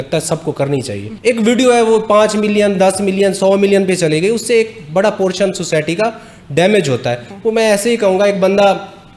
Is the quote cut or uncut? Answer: cut